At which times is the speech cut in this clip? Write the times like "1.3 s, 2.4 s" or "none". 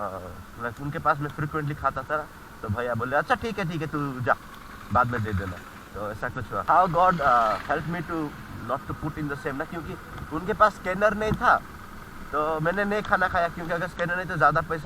6.6 s